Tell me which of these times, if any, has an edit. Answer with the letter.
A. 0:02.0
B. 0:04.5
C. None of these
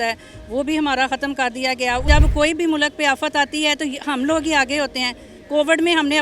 A